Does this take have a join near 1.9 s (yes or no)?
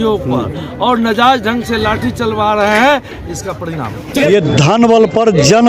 no